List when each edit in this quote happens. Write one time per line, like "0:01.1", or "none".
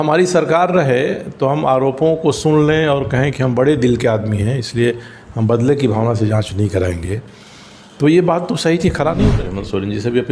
0:09.3